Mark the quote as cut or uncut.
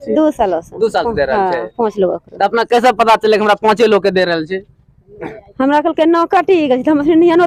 uncut